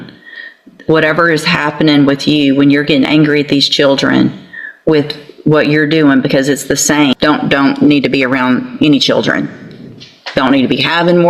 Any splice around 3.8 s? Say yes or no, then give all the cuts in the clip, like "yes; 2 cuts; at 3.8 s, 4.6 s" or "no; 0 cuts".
no; 1 cut; at 7.1 s